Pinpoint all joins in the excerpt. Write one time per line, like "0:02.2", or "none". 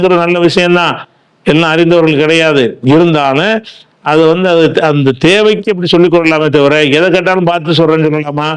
none